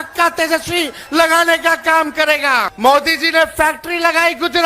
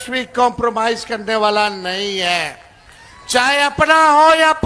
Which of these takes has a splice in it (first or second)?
first